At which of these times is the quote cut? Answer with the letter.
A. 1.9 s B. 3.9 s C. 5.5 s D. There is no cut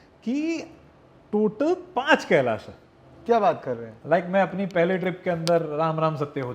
B